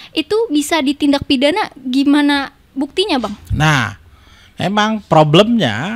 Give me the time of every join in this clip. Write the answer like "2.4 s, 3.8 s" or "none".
none